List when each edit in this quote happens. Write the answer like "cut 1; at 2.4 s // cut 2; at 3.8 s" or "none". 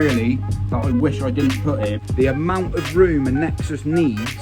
cut 1; at 2.0 s